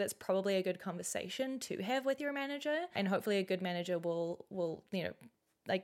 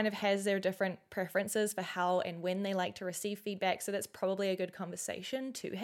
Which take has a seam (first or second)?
first